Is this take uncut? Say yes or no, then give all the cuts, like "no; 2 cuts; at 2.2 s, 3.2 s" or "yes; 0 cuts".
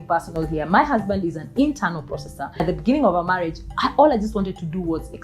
no; 1 cut; at 2.6 s